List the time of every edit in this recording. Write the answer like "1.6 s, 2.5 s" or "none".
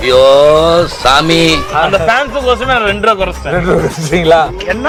none